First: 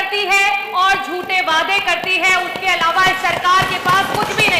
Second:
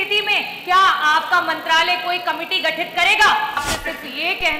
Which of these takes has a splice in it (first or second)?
second